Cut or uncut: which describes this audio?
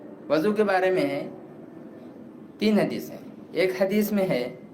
uncut